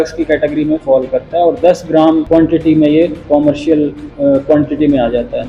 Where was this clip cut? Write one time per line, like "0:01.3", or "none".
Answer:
0:02.2
0:04.0